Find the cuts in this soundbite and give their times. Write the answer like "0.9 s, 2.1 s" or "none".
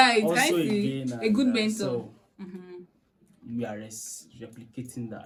none